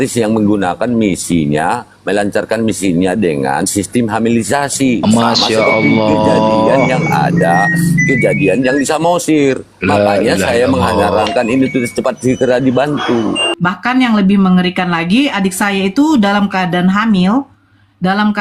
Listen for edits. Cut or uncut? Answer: cut